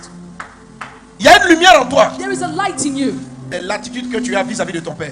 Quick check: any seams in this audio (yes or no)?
yes